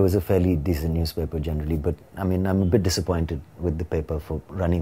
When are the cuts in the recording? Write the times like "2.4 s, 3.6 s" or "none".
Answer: none